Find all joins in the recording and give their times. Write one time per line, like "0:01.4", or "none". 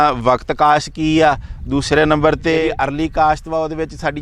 0:02.7